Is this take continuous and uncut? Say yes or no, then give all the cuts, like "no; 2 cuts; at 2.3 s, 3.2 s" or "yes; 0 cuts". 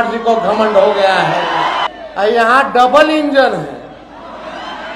no; 1 cut; at 1.9 s